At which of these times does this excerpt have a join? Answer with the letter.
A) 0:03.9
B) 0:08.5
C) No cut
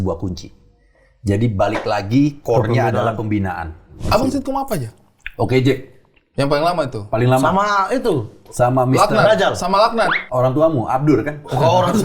A